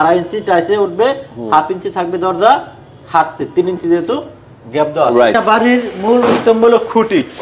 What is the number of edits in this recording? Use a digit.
1